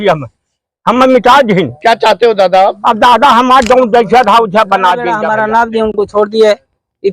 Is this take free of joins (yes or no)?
no